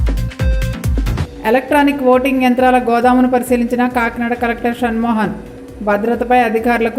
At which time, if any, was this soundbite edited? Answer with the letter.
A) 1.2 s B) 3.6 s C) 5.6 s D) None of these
A